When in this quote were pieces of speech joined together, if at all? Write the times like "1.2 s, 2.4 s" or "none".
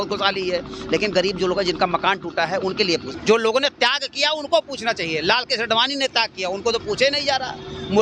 3.1 s

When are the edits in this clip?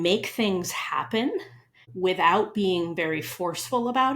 1.9 s

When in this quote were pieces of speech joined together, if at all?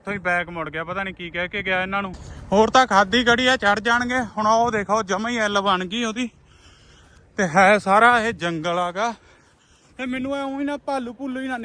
2.3 s

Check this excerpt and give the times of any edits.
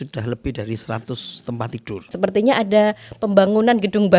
2.1 s

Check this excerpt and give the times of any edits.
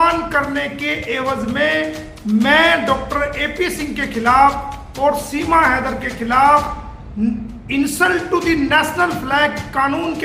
none

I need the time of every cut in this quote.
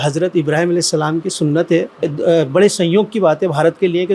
2.1 s

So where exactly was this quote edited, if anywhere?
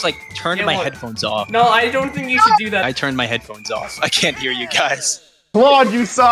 5.4 s

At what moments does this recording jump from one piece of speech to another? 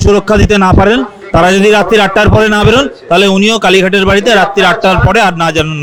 none

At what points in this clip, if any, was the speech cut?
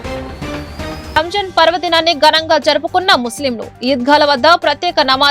1.1 s

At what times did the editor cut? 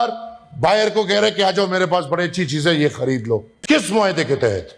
none

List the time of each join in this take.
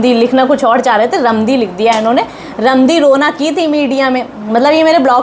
none

